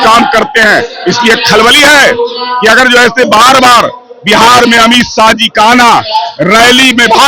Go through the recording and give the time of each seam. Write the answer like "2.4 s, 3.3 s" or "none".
none